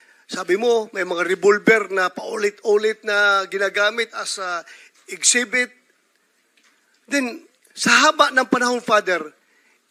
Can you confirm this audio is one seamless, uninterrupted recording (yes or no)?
yes